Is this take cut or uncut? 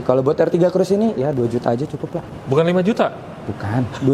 uncut